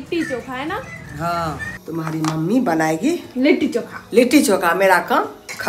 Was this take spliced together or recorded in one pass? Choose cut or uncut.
cut